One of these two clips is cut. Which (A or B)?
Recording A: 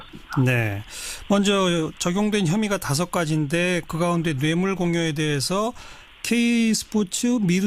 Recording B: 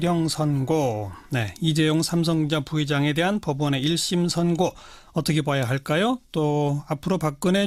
A